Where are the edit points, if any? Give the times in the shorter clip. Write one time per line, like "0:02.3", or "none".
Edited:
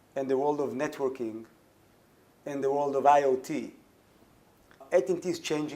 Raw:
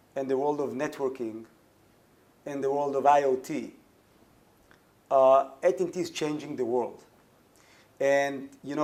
0:04.8